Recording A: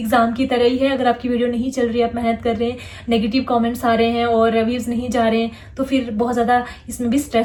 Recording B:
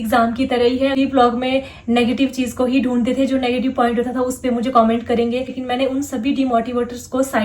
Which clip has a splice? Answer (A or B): B